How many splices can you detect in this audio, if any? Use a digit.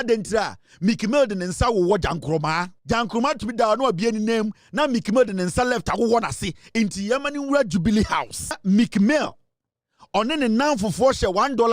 2